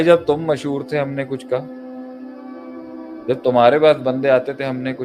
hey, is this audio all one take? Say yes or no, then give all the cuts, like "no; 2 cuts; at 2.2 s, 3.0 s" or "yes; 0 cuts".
yes; 0 cuts